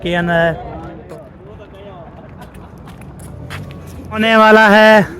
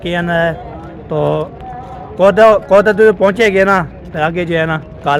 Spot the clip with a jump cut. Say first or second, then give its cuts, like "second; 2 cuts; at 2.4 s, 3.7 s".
first; 2 cuts; at 1.0 s, 4.2 s